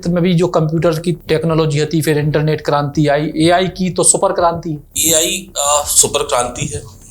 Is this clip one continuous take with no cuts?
no; 2 cuts; at 1.2 s, 4.9 s

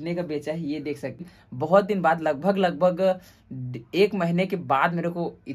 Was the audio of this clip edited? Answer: yes; 1 cut; at 1.3 s

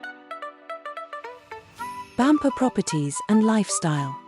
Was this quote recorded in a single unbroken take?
no; 1 cut; at 2.1 s

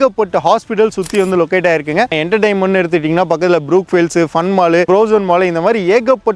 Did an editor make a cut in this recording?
yes; 2 cuts; at 2.1 s, 4.9 s

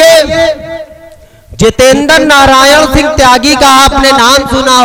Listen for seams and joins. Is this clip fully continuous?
yes; 0 cuts

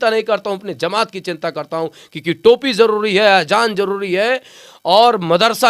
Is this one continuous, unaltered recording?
yes; 0 cuts

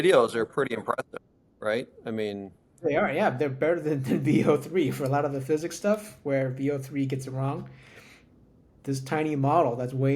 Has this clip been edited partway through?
no; 0 cuts

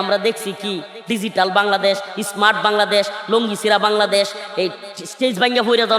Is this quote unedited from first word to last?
yes; 0 cuts

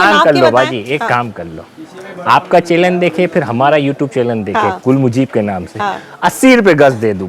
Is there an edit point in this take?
no; 0 cuts

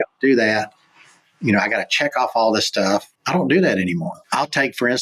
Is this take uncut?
no; 2 cuts; at 3.2 s, 4.2 s

